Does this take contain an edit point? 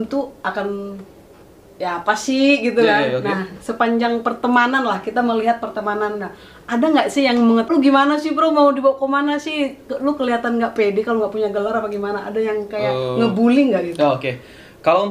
yes; 1 cut; at 7.7 s

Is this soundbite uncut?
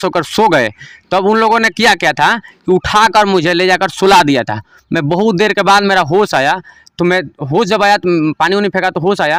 yes; 0 cuts

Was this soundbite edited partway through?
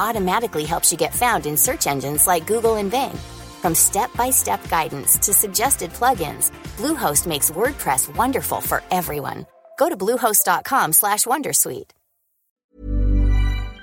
yes; 1 cut; at 12.7 s

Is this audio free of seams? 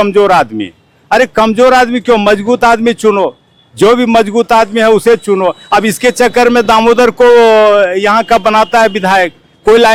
yes; 0 cuts

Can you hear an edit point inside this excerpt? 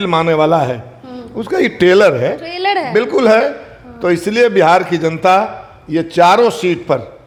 no; 0 cuts

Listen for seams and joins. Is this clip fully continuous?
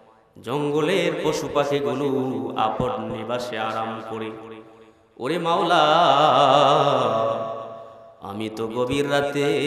yes; 0 cuts

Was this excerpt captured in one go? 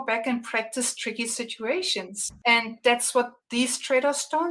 no; 2 cuts; at 2.2 s, 3.4 s

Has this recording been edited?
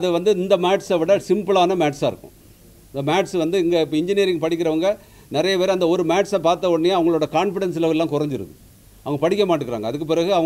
no; 0 cuts

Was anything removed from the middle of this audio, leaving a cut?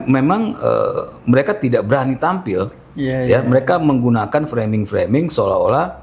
no; 0 cuts

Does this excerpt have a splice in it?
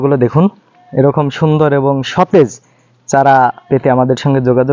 no; 0 cuts

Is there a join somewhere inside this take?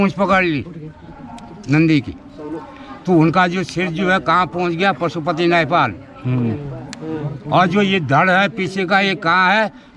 no; 0 cuts

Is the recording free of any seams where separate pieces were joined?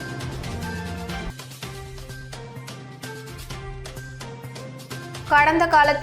no; 1 cut; at 1.0 s

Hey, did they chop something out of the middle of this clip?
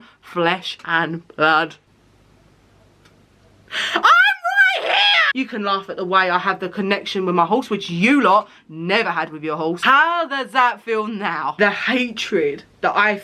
yes; 2 cuts; at 5.3 s, 11.6 s

